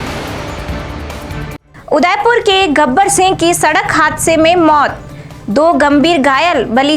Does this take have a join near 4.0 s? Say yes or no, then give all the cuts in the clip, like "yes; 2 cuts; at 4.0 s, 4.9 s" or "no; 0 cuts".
no; 1 cut; at 1.7 s